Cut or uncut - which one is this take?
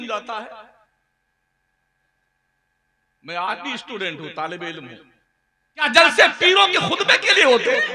cut